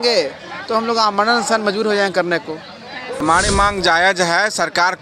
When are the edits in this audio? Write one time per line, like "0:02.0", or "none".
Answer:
0:03.2